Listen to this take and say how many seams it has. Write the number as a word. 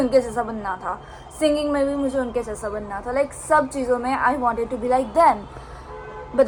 zero